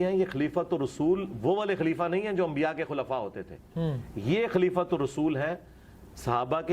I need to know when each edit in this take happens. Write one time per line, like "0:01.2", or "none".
none